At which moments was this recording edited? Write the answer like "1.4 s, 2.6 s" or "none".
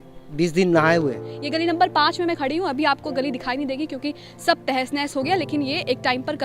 1.3 s

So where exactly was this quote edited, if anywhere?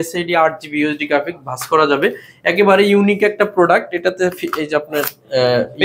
none

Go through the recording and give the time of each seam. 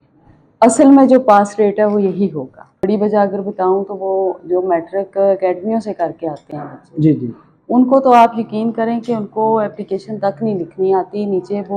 2.9 s

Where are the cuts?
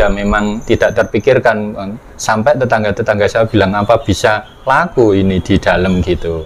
none

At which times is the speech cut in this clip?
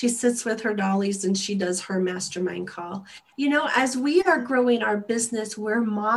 3.2 s

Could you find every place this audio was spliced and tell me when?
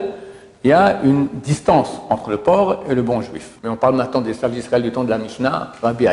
3.5 s

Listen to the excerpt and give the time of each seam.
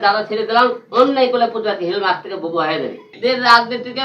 3.0 s

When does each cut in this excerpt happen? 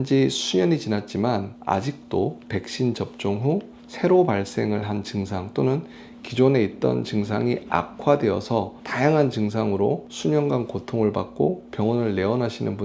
none

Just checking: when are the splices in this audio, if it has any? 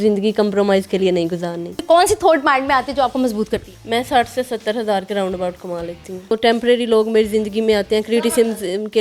1.8 s, 3.7 s, 6.4 s

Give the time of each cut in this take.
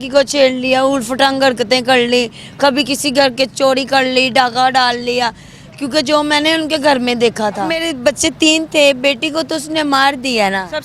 7.8 s

